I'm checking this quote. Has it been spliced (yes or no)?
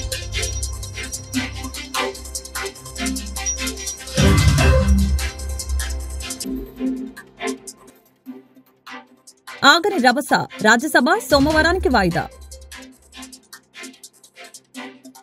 yes